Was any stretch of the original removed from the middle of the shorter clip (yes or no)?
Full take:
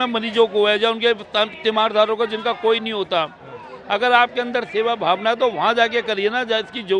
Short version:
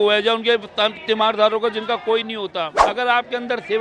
yes